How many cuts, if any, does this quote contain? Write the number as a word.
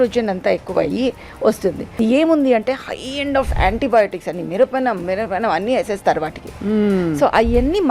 one